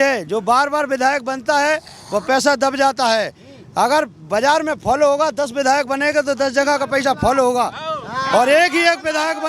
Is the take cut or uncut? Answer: uncut